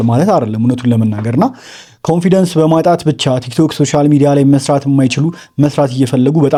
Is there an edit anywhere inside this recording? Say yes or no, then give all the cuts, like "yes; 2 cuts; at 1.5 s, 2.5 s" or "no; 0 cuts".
no; 0 cuts